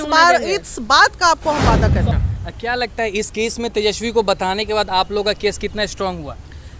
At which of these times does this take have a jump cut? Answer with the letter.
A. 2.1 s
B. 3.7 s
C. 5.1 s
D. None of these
A